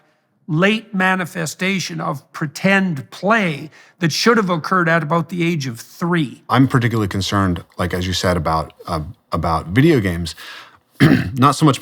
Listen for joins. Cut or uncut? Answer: cut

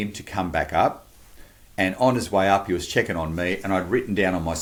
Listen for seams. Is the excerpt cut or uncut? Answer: uncut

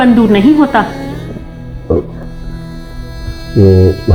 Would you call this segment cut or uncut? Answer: uncut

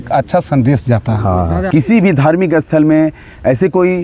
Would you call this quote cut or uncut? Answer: cut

